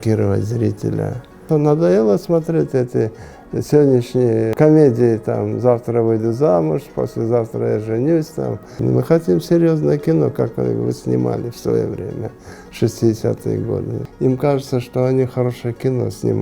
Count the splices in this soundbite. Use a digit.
4